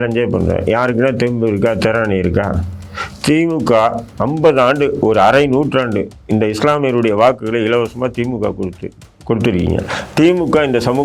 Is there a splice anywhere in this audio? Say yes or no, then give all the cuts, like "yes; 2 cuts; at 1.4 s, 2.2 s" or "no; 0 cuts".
no; 0 cuts